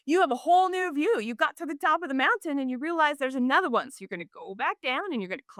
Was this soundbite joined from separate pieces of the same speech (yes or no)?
no